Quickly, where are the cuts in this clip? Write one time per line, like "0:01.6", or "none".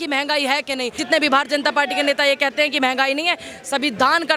0:01.0

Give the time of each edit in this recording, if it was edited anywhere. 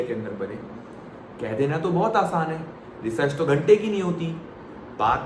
none

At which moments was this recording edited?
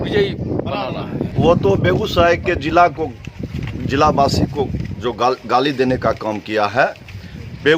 0:01.3

